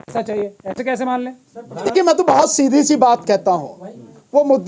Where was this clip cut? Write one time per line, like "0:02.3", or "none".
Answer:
none